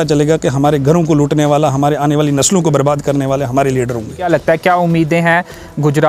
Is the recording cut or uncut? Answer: uncut